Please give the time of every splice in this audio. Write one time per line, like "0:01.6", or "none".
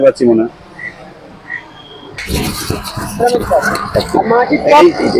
0:02.2

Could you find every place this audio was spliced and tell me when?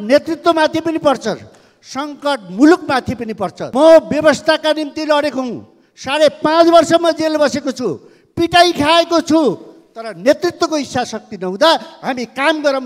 0:03.6

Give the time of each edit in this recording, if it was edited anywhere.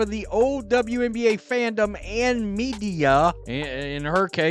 0:03.4

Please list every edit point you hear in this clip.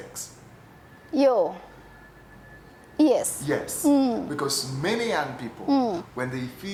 none

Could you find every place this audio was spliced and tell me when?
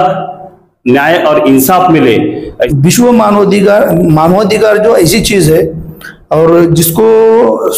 0:02.6

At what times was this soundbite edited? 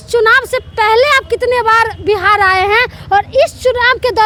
none

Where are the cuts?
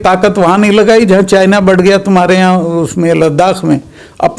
none

